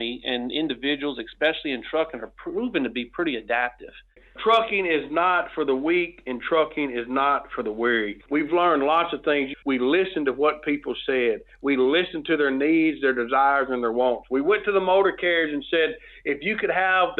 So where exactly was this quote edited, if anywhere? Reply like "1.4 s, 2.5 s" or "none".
4.2 s, 8.2 s, 9.6 s